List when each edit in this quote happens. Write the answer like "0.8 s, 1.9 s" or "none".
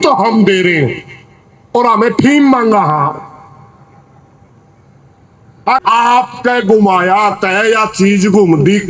5.8 s

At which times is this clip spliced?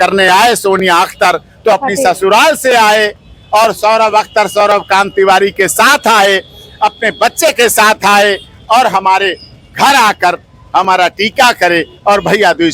none

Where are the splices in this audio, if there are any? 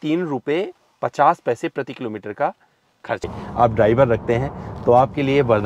3.3 s

